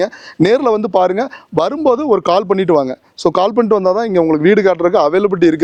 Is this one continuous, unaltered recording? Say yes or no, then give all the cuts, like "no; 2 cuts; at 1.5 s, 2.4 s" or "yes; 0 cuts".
yes; 0 cuts